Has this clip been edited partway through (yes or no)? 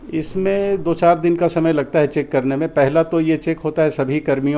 no